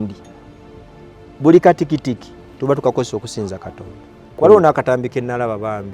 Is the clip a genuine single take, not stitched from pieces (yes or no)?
no